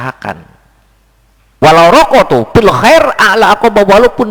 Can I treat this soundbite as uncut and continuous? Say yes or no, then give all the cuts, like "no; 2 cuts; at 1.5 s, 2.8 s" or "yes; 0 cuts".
no; 1 cut; at 1.6 s